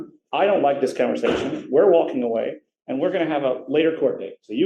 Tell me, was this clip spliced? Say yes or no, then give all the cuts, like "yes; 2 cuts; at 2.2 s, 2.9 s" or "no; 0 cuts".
no; 0 cuts